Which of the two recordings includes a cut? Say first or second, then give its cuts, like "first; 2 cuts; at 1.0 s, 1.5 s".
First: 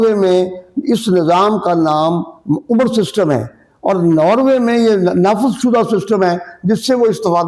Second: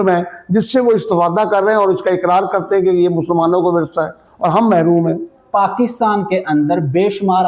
second; 1 cut; at 5.4 s